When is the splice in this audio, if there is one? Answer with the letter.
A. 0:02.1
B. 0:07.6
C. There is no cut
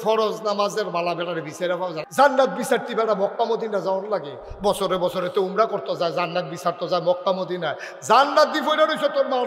A